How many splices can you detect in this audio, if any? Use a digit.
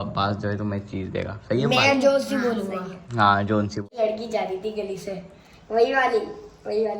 1